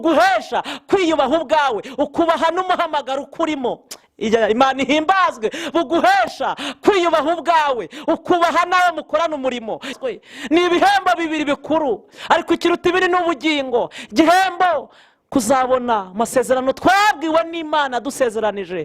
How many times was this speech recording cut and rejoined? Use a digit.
1